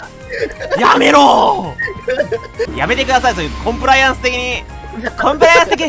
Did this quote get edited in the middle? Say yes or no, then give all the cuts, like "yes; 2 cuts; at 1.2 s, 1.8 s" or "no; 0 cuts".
yes; 1 cut; at 2.7 s